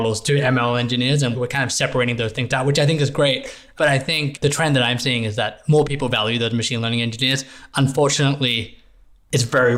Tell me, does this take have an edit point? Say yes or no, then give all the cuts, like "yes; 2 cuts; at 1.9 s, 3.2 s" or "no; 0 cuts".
no; 0 cuts